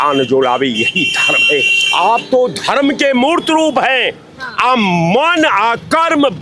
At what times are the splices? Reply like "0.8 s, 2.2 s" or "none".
none